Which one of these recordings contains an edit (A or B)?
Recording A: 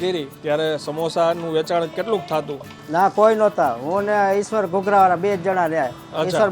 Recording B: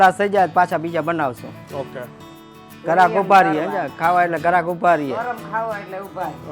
A